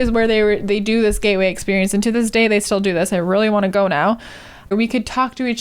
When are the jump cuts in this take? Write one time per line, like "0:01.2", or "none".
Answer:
0:04.7